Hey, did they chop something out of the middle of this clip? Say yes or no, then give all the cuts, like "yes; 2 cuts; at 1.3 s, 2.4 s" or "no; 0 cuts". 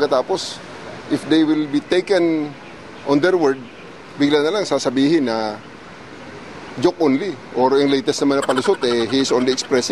yes; 1 cut; at 7.4 s